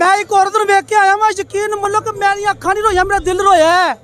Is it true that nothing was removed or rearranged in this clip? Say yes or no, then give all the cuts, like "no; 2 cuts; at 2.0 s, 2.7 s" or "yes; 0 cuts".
yes; 0 cuts